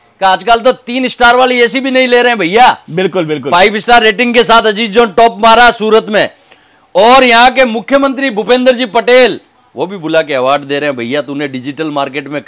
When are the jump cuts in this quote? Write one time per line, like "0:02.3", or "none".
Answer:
none

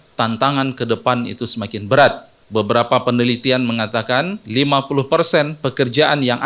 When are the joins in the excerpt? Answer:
0:02.3

